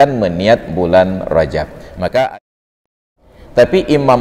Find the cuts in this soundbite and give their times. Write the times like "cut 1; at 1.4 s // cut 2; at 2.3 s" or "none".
cut 1; at 2.8 s